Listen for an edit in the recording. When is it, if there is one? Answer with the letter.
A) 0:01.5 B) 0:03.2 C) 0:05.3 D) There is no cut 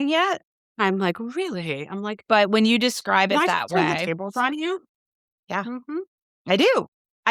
D